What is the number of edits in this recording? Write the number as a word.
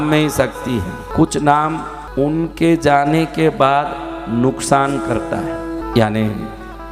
three